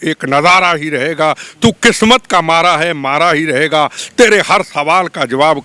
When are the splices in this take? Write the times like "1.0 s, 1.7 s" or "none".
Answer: none